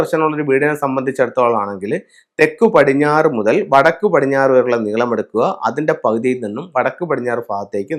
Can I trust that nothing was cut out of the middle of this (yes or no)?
yes